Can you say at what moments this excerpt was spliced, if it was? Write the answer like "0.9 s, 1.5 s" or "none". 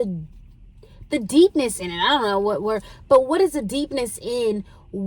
none

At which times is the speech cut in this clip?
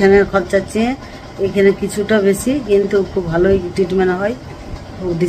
none

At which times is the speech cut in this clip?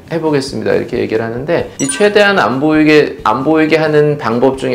none

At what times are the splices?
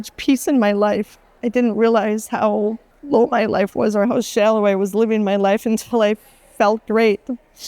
1.3 s, 2.9 s

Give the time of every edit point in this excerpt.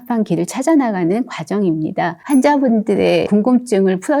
2.2 s

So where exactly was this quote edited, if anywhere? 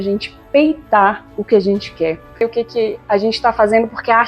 2.5 s

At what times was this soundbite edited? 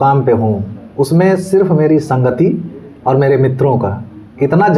none

